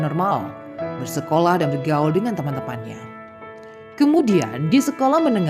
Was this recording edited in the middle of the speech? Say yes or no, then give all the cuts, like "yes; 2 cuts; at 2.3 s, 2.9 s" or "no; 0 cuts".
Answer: no; 0 cuts